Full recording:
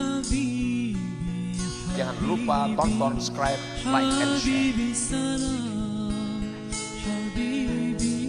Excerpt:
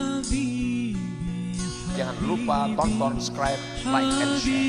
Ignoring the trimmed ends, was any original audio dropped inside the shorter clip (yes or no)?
no